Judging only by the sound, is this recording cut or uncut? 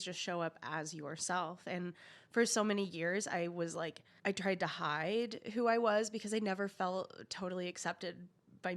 cut